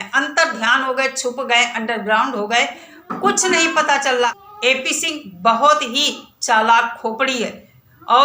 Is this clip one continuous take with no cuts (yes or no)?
no